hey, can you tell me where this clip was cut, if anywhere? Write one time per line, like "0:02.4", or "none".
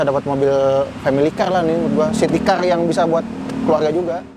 none

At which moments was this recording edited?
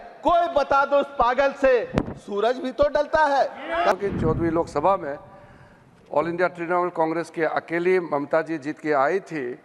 0:04.0

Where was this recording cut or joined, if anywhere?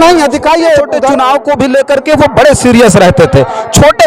0:01.0

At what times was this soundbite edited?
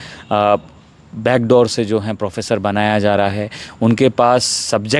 none

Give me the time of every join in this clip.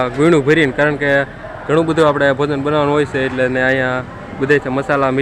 none

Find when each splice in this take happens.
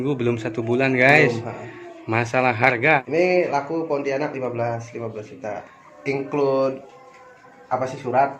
0:03.0
0:05.7

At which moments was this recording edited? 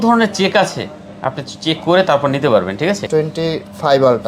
0:03.0

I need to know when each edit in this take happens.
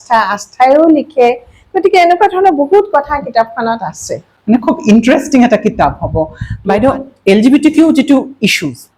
none

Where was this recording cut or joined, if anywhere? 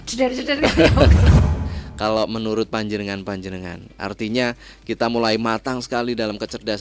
0:01.4

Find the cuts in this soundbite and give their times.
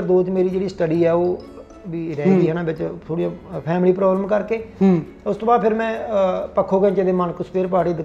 none

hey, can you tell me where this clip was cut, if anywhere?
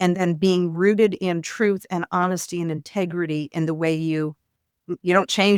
none

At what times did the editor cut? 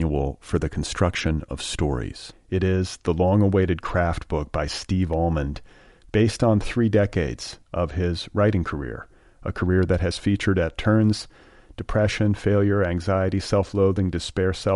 none

